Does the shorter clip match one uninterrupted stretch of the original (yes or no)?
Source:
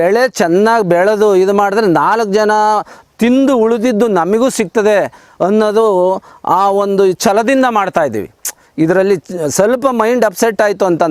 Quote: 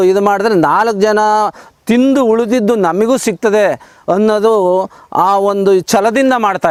yes